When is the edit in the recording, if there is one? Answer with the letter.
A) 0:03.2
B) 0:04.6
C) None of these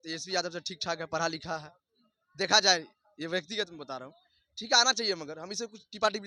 C